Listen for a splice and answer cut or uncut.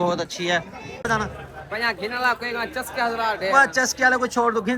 cut